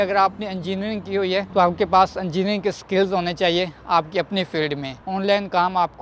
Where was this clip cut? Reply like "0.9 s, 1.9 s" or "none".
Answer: 5.0 s